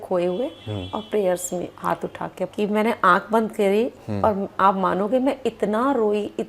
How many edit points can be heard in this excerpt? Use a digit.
1